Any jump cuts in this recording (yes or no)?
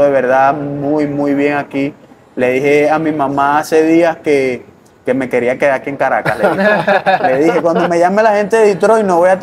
no